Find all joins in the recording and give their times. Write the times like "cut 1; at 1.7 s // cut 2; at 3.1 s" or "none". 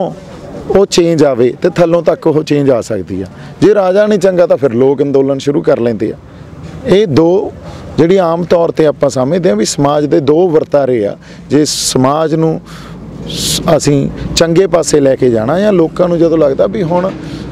none